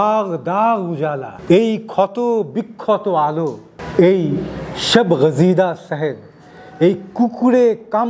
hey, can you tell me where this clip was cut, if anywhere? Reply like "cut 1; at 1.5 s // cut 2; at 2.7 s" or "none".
cut 1; at 1.3 s

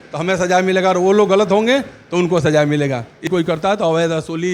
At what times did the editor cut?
cut 1; at 3.3 s

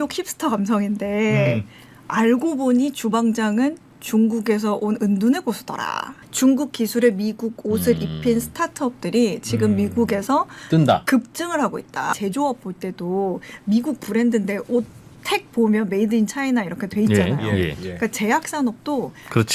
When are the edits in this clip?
cut 1; at 6.2 s // cut 2; at 12.1 s

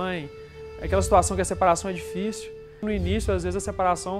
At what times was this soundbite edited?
cut 1; at 2.8 s

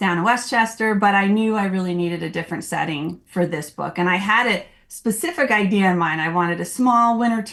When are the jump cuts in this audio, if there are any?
none

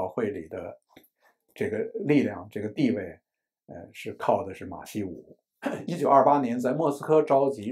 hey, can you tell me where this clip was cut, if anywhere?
cut 1; at 5.9 s

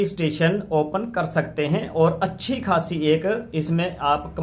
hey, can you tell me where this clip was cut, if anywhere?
none

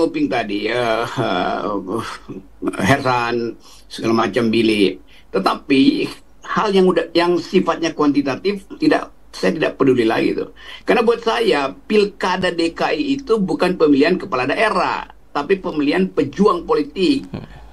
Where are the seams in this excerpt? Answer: none

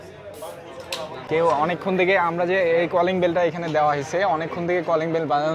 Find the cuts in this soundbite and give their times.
cut 1; at 1.3 s

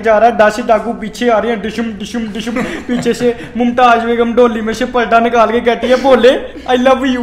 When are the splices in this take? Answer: none

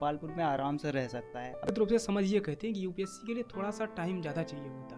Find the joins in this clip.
cut 1; at 1.7 s

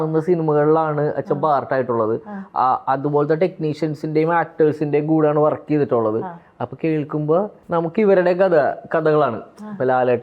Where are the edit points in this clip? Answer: none

